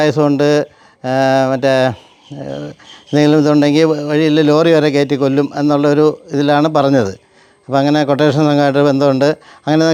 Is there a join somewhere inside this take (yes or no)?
no